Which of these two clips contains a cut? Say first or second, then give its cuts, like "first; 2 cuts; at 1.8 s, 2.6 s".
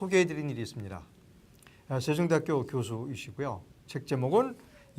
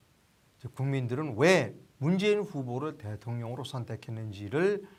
first; 1 cut; at 3.5 s